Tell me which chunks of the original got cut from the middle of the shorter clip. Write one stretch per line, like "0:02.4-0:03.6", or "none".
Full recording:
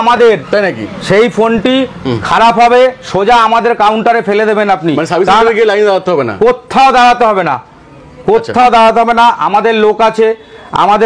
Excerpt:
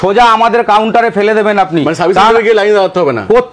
none